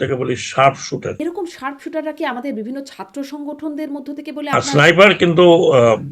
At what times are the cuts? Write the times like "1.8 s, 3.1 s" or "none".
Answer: 1.2 s, 4.5 s